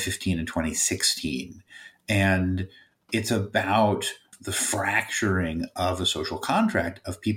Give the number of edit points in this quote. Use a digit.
1